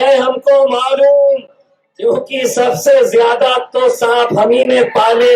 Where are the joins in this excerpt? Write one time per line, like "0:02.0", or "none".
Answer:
none